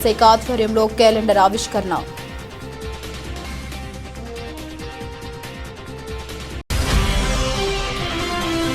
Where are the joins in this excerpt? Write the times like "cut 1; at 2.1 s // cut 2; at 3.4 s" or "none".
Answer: cut 1; at 2.2 s // cut 2; at 6.6 s